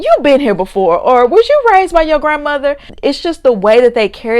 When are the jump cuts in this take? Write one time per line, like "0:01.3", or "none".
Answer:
0:02.9